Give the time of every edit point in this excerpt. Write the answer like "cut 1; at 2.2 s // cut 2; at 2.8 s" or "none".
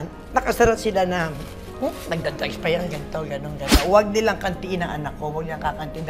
cut 1; at 3.7 s